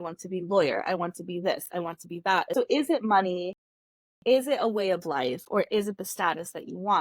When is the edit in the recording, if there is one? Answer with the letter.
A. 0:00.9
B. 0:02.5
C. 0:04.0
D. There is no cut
B